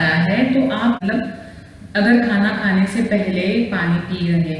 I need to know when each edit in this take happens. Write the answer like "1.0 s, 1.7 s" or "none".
1.0 s